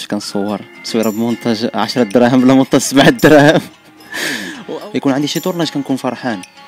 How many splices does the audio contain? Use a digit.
1